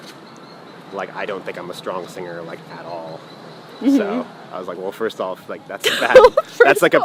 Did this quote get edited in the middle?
no; 0 cuts

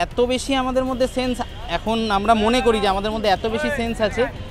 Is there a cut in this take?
no; 0 cuts

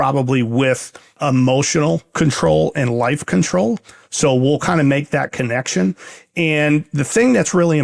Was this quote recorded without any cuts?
no; 1 cut; at 1.2 s

